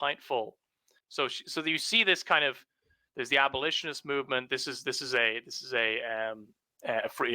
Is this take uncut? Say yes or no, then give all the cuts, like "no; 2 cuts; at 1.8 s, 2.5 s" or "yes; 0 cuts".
no; 1 cut; at 1.0 s